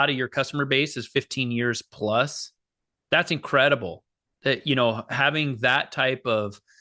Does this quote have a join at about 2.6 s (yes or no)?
no